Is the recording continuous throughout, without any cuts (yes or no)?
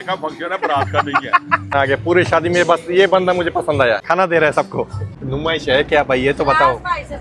no